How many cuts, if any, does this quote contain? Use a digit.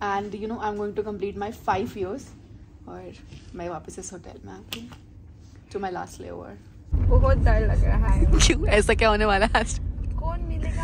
1